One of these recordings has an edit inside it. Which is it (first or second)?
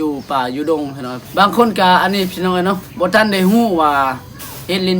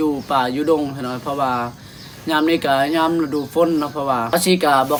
first